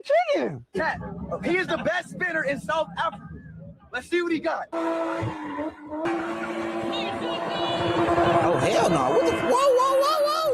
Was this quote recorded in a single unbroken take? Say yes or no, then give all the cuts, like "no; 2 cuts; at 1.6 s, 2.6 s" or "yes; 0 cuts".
no; 1 cut; at 6.0 s